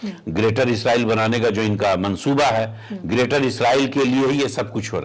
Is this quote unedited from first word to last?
yes; 0 cuts

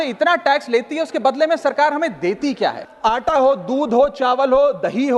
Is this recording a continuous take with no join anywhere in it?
no; 1 cut; at 2.9 s

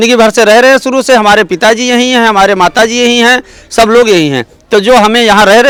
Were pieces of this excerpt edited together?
no; 0 cuts

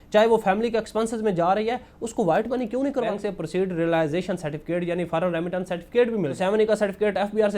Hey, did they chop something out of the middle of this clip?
yes; 2 cuts; at 3.1 s, 6.3 s

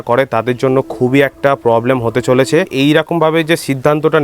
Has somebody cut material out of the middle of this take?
yes; 1 cut; at 2.7 s

